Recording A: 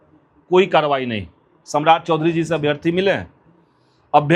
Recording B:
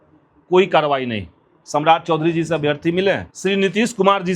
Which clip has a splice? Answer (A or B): B